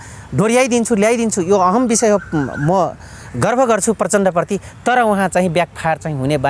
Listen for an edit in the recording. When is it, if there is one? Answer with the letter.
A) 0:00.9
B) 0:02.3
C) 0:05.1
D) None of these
D